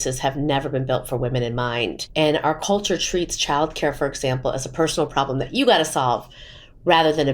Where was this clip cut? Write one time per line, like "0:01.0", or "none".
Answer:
0:02.0